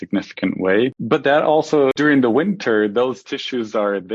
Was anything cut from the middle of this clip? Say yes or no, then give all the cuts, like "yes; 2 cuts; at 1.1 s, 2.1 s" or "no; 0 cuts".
yes; 2 cuts; at 1.0 s, 1.9 s